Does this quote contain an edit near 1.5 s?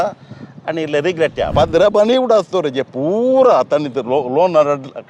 yes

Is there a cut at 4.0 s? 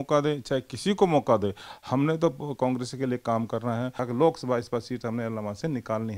yes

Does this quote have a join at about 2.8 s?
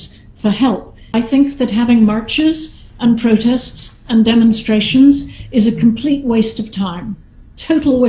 no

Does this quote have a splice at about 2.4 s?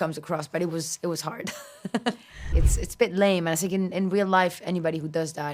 yes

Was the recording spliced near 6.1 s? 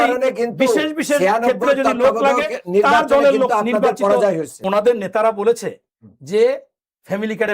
no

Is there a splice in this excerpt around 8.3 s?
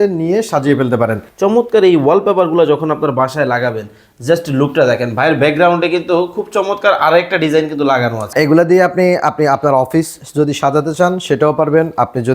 yes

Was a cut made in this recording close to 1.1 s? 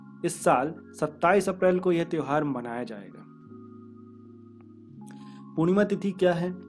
no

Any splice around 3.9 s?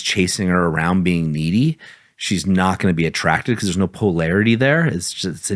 no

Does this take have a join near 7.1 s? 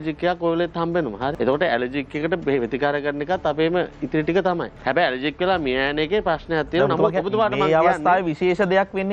no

